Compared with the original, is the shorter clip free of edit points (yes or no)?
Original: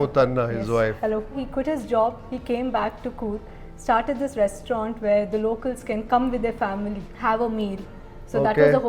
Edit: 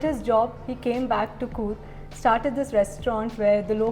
yes